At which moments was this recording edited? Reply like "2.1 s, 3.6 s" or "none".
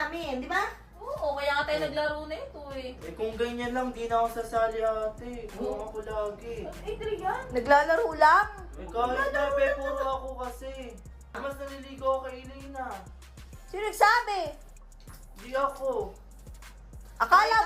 11.3 s